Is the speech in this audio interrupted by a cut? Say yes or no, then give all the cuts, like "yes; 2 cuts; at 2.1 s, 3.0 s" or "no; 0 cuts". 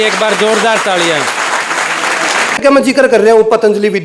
yes; 1 cut; at 2.6 s